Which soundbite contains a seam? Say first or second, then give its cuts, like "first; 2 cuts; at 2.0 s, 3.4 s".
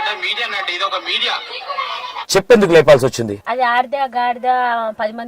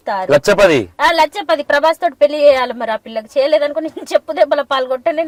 first; 2 cuts; at 2.2 s, 3.4 s